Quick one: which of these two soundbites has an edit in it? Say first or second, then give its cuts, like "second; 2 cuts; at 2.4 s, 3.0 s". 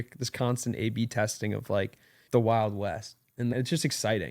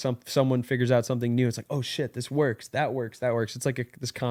first; 2 cuts; at 2.2 s, 3.5 s